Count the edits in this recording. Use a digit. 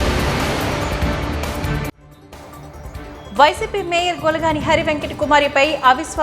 1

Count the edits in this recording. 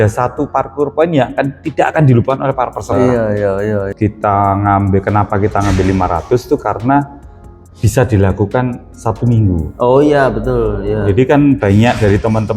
1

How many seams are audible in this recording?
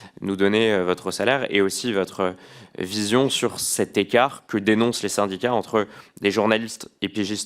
0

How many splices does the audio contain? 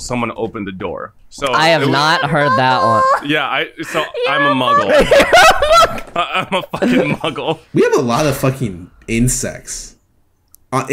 1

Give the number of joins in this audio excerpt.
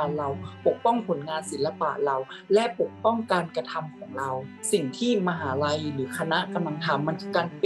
1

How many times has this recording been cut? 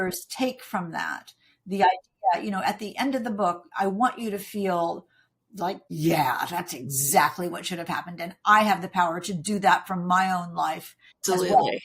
1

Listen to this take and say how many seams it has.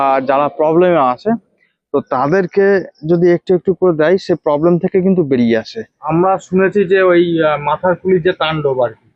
1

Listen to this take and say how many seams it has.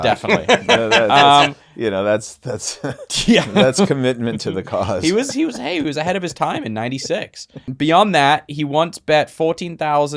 1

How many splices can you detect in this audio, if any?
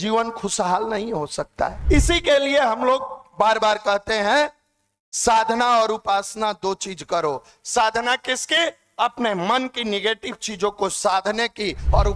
1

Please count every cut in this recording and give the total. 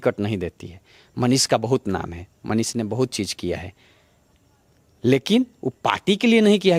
0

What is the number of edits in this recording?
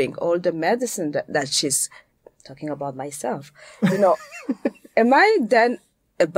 0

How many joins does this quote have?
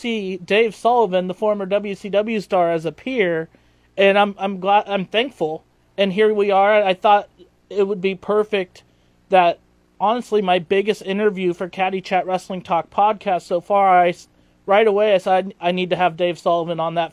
0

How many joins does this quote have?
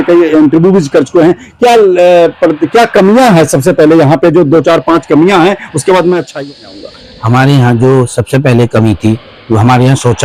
0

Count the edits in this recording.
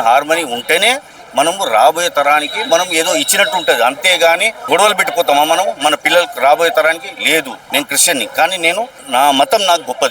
3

